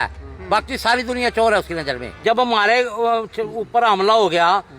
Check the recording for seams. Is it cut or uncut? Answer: cut